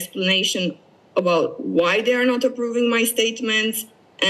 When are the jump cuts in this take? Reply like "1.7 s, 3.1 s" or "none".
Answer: none